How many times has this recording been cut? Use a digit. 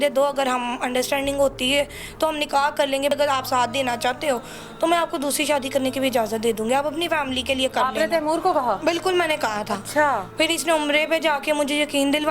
2